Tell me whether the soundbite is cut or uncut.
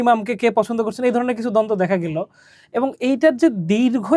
uncut